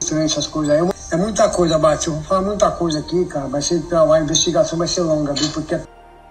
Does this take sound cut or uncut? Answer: cut